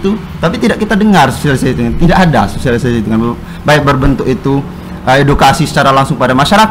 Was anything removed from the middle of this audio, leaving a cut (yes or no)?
no